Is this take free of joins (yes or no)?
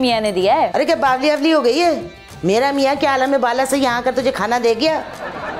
yes